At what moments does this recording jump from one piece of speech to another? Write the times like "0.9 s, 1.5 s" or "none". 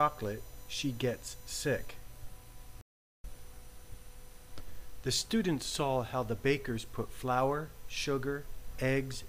2.8 s